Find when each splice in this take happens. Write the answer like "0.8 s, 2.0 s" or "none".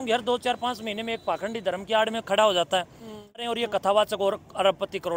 3.4 s